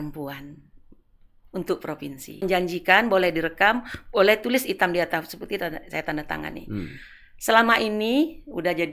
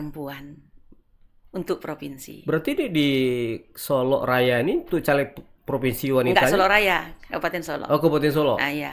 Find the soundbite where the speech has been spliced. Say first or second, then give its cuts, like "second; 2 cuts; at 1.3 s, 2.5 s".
first; 1 cut; at 2.4 s